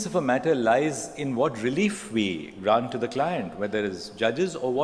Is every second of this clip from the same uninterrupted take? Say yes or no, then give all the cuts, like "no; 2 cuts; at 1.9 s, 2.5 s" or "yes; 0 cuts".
yes; 0 cuts